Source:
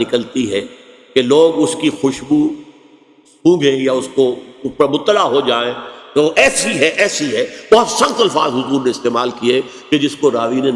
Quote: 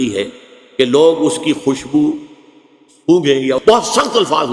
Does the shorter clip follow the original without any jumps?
no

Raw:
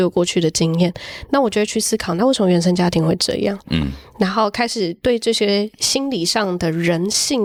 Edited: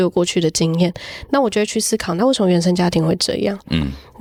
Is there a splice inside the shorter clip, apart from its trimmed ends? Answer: no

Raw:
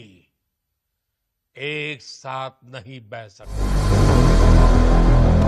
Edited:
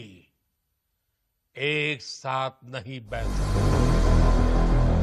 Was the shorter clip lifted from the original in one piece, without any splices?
no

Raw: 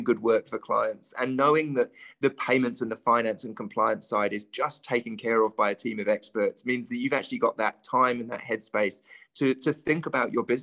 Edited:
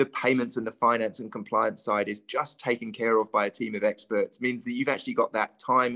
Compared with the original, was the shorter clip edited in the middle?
no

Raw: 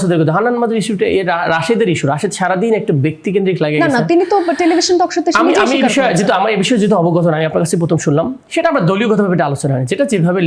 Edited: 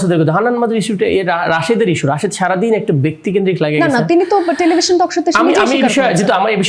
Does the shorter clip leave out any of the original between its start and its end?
no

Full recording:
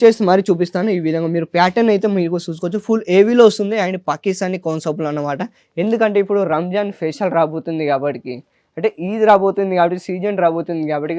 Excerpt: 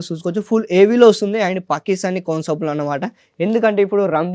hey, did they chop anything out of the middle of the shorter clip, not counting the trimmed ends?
no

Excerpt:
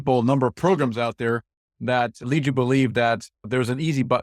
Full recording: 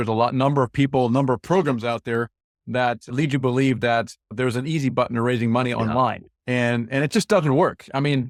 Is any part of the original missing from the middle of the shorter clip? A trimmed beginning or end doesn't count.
no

